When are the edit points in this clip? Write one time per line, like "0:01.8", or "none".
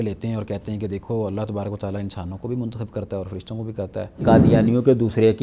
0:04.2